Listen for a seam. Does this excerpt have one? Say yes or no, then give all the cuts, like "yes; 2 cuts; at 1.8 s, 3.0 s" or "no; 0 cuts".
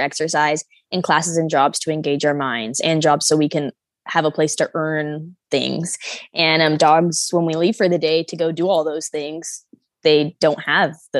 no; 0 cuts